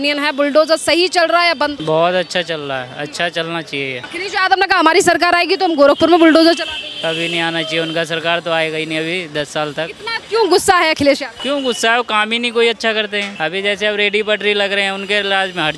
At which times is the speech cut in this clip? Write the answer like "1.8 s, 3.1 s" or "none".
1.8 s, 4.0 s, 11.3 s, 13.3 s